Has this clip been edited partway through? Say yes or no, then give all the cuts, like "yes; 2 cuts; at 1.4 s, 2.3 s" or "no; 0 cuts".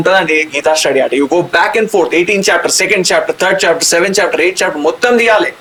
no; 0 cuts